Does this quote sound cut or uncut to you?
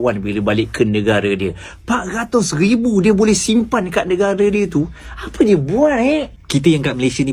uncut